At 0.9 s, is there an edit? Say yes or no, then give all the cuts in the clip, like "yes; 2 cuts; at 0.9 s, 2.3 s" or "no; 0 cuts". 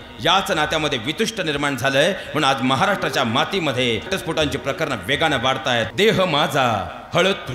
no; 2 cuts; at 4.1 s, 5.9 s